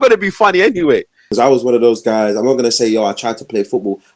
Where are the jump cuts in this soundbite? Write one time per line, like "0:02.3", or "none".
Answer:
0:01.2